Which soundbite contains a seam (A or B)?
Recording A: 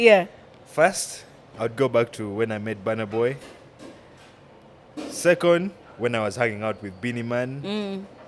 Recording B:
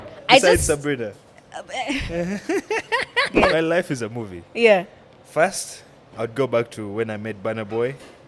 B